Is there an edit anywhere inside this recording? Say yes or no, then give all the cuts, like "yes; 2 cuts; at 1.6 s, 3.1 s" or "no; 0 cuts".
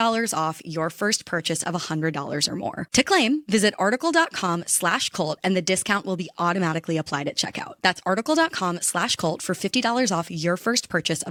no; 0 cuts